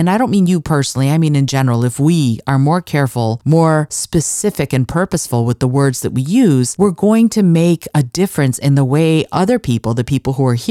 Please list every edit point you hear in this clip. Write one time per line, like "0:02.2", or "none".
0:03.4
0:04.0
0:06.7